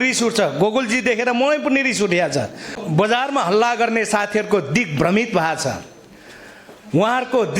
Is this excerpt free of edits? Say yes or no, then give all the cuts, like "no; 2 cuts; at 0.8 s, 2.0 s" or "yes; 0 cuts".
no; 1 cut; at 2.8 s